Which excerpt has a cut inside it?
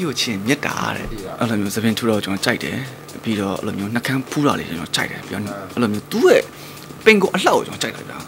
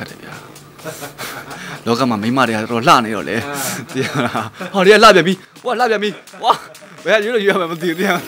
first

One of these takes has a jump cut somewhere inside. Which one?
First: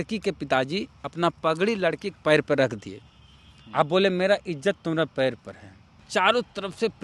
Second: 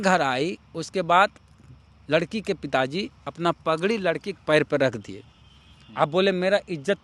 first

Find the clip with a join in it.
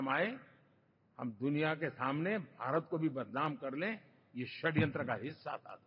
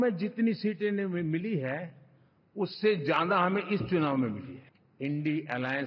second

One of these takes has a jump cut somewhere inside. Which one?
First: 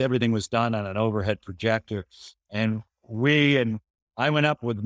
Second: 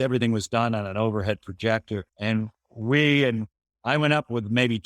second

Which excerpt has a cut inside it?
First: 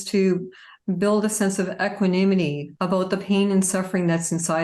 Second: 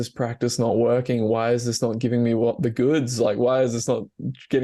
first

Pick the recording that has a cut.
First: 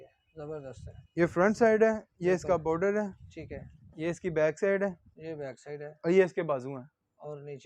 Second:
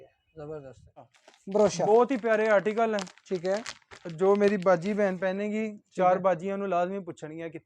second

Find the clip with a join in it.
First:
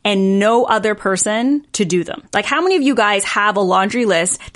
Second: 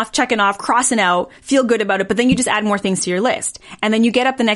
first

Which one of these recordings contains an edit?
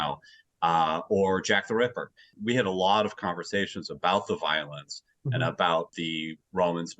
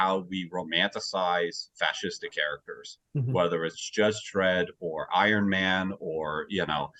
first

